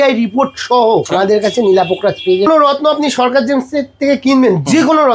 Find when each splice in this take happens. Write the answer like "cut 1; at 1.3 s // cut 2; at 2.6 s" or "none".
cut 1; at 1.1 s // cut 2; at 2.5 s